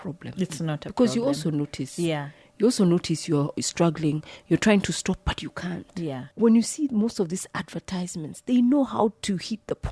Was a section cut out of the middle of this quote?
yes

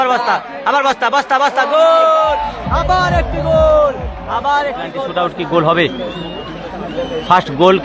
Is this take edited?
yes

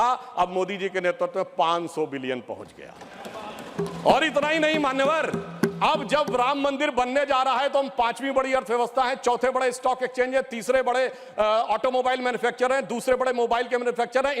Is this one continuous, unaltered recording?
yes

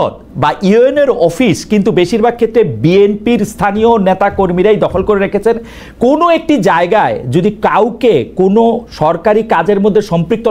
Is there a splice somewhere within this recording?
no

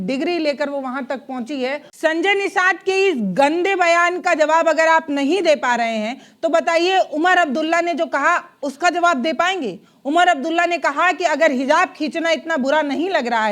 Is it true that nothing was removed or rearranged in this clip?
no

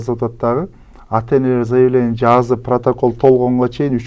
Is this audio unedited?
yes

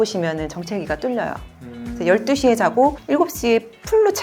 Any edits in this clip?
no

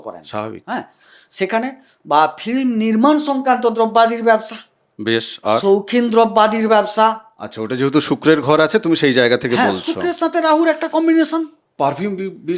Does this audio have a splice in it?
no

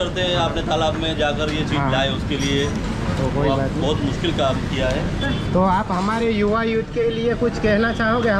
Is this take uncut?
yes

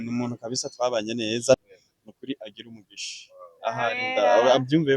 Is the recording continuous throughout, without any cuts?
no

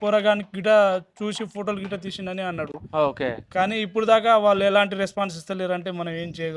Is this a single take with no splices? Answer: yes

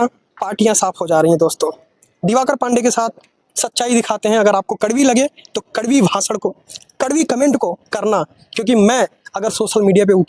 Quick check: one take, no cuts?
yes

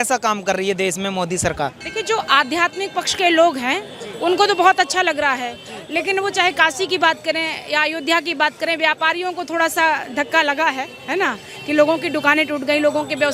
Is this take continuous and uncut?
yes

